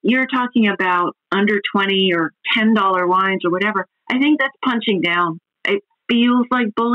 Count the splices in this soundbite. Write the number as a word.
zero